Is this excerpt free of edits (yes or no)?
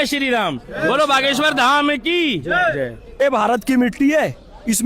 no